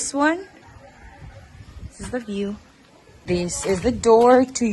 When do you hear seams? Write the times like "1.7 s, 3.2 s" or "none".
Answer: 3.3 s